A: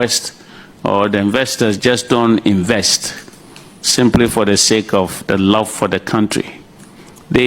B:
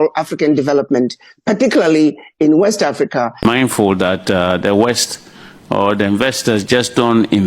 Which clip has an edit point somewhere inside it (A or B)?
B